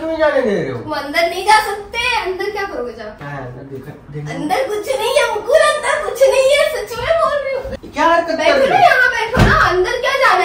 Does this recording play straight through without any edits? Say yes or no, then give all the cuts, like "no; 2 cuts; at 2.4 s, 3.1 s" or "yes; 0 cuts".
no; 2 cuts; at 3.2 s, 7.7 s